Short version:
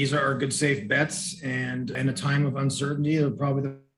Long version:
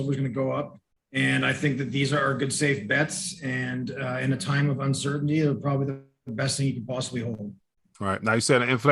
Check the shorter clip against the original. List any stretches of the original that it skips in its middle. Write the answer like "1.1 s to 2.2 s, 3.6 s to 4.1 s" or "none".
3.9 s to 4.2 s

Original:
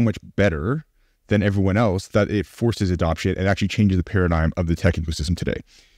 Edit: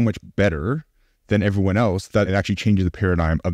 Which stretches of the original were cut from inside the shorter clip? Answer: 2.3 s to 3.4 s

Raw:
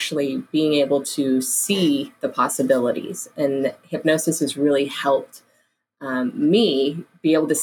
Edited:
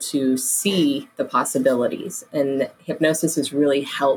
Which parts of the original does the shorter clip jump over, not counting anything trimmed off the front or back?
none

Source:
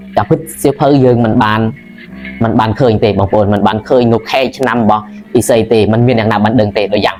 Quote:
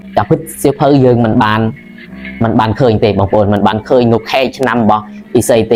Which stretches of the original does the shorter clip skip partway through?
none

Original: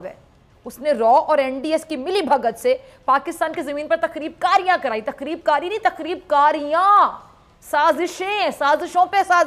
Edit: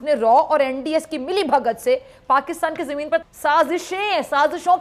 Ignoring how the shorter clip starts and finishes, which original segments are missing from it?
4.0 s to 7.5 s

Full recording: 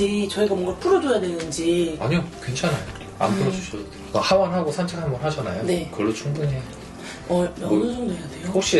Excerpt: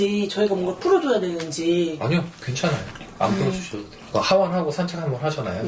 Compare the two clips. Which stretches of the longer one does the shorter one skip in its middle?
none

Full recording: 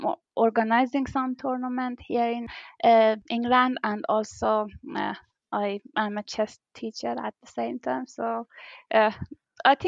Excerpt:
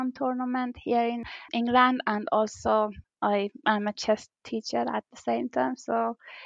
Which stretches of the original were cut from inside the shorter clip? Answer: 2.7 s to 3.2 s, 4.8 s to 5.3 s

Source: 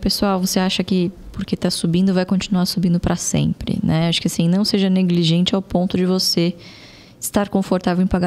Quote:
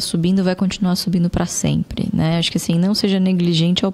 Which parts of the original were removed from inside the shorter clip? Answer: none

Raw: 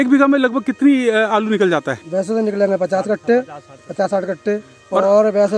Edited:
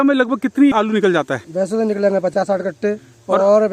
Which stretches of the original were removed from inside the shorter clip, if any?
1.0 s to 1.3 s, 2.9 s to 3.9 s

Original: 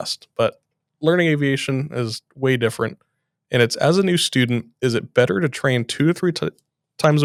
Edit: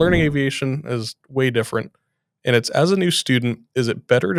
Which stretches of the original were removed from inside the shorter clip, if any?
none

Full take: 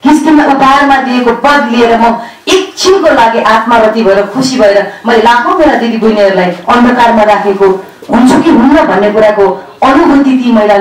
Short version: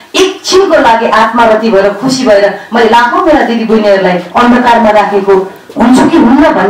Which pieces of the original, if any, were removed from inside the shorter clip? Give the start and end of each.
none

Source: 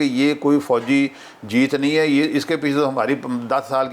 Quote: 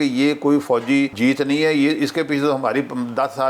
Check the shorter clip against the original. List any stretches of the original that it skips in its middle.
1.1 s to 1.5 s

